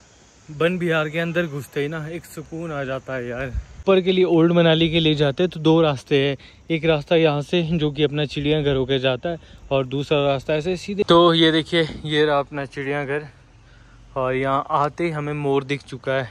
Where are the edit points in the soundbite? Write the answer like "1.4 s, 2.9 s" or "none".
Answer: 3.8 s, 11.0 s